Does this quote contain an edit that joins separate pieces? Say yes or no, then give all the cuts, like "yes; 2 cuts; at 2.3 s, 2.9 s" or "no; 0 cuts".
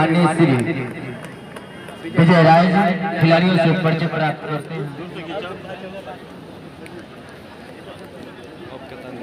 yes; 1 cut; at 4.6 s